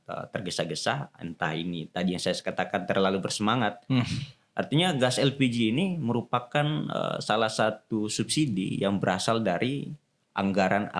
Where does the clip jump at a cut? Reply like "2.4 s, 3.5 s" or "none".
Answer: none